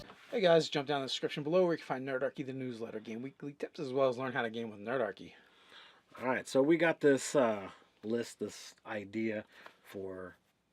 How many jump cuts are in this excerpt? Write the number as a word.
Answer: one